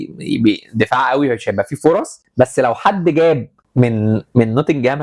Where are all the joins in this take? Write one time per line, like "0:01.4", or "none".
0:02.2
0:03.6